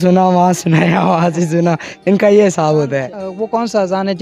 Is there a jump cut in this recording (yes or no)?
yes